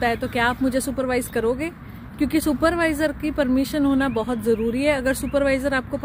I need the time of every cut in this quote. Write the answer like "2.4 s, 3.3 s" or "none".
none